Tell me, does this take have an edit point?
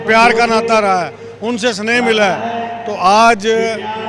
no; 0 cuts

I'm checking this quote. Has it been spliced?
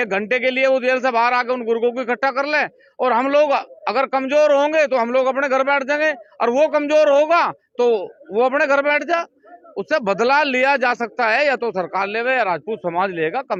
no; 0 cuts

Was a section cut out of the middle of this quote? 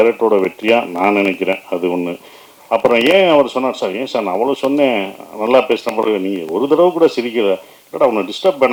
no; 0 cuts

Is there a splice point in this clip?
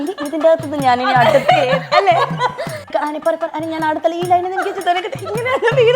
yes; 1 cut; at 2.8 s

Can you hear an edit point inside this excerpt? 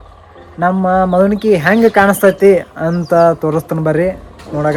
no; 0 cuts

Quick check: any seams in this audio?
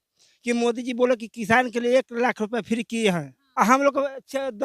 yes; 1 cut; at 3.4 s

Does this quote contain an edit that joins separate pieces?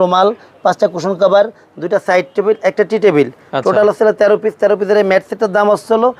no; 0 cuts

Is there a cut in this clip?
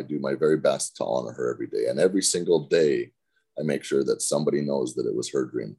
no; 0 cuts

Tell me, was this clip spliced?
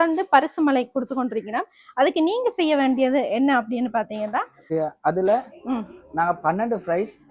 yes; 1 cut; at 4.7 s

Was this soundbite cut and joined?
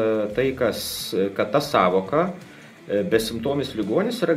no; 0 cuts

